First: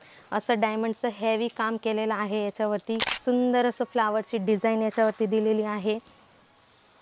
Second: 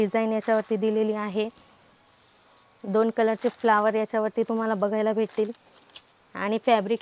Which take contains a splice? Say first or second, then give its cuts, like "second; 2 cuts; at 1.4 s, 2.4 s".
first; 1 cut; at 3.0 s